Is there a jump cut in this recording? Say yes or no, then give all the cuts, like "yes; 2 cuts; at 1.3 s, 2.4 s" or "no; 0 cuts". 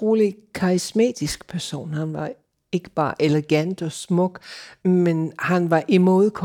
yes; 1 cut; at 4.7 s